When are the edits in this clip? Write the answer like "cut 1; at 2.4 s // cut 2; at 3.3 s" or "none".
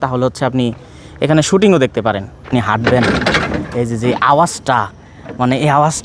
cut 1; at 2.4 s